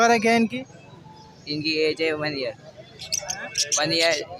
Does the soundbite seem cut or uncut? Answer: uncut